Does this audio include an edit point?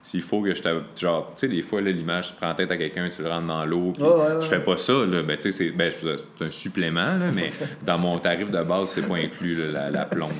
no; 0 cuts

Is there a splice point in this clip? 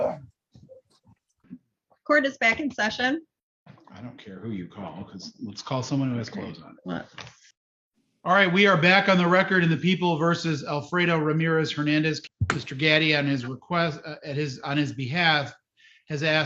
yes; 1 cut; at 1.4 s

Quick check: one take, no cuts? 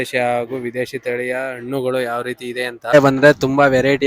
no; 1 cut; at 2.9 s

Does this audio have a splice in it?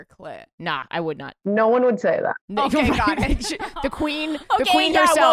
no; 0 cuts

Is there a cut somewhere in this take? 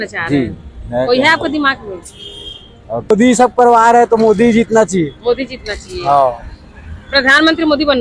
yes; 1 cut; at 3.1 s

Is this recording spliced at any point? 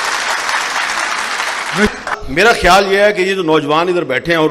yes; 1 cut; at 2.2 s

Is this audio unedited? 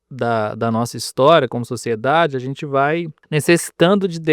no; 1 cut; at 3.2 s

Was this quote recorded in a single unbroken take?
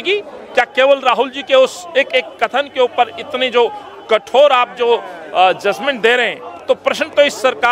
yes; 0 cuts

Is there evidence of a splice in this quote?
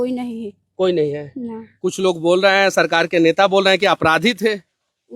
yes; 1 cut; at 1.8 s

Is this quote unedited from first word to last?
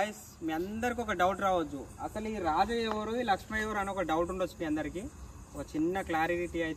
yes; 0 cuts

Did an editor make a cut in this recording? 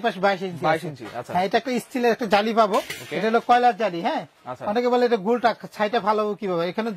no; 0 cuts

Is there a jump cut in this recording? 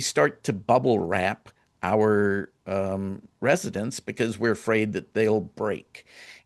no; 0 cuts

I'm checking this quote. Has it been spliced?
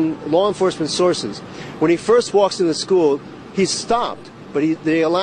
no; 0 cuts

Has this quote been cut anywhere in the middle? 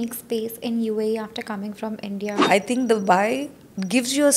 yes; 1 cut; at 2.4 s

